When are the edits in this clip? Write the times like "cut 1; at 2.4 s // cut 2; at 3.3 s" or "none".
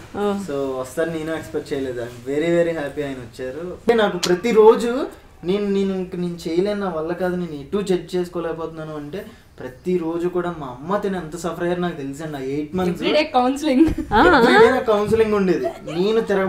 cut 1; at 3.9 s

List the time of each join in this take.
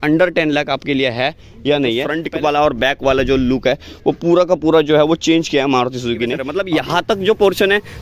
cut 1; at 2.2 s // cut 2; at 6.5 s

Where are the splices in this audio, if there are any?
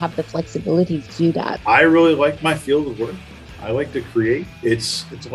cut 1; at 1.6 s // cut 2; at 4.5 s

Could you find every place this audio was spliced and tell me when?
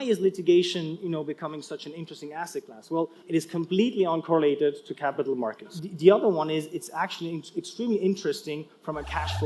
cut 1; at 3.2 s // cut 2; at 5.7 s

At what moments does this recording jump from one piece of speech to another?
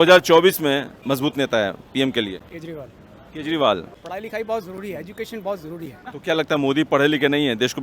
cut 1; at 0.9 s // cut 2; at 4.0 s // cut 3; at 6.0 s

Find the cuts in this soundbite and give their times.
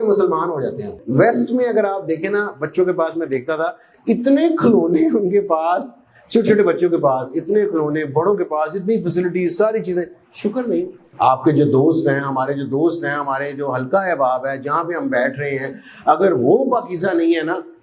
cut 1; at 1.0 s // cut 2; at 11.0 s

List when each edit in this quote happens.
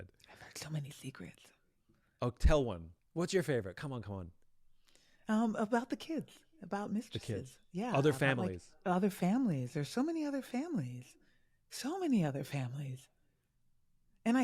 cut 1; at 2.9 s

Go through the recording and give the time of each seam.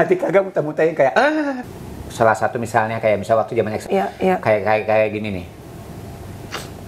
cut 1; at 1.7 s // cut 2; at 3.8 s

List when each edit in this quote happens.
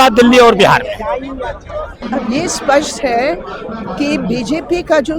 cut 1; at 2.0 s

